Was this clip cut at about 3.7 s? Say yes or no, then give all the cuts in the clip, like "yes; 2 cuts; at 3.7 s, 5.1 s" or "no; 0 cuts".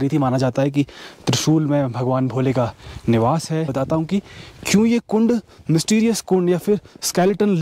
yes; 1 cut; at 3.7 s